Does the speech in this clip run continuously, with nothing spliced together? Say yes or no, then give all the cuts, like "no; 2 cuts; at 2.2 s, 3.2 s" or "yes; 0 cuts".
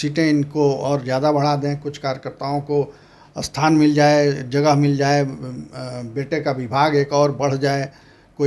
yes; 0 cuts